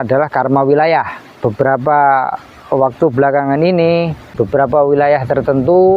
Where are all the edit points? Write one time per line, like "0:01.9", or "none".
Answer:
0:01.4
0:04.2